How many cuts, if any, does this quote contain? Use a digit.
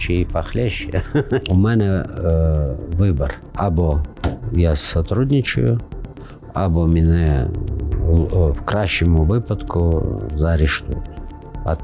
3